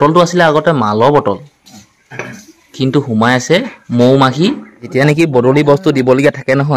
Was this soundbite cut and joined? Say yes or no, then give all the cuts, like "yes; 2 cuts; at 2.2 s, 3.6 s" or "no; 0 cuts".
yes; 1 cut; at 4.7 s